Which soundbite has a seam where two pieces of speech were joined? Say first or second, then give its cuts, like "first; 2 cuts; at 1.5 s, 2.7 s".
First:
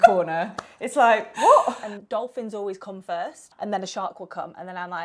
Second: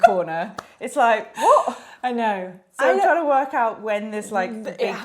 first; 2 cuts; at 1.8 s, 3.4 s